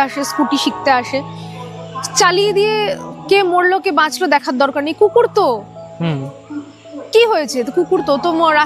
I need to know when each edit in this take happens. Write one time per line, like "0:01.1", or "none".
none